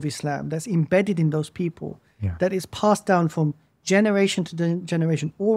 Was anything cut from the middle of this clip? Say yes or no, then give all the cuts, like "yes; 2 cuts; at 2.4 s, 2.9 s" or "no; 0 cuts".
no; 0 cuts